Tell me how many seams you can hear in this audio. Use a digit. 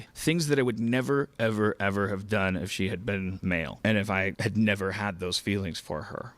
0